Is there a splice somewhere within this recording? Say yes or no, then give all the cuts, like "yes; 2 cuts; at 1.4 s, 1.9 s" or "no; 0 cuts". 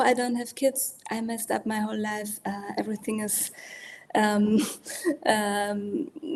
no; 0 cuts